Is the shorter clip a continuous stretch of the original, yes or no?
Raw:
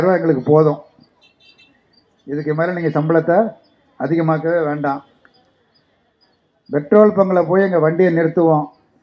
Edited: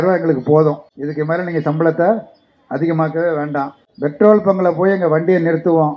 no